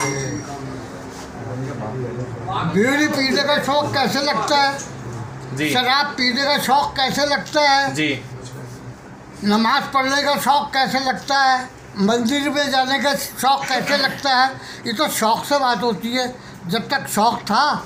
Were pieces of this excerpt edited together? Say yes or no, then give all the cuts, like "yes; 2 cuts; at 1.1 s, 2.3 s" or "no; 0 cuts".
no; 0 cuts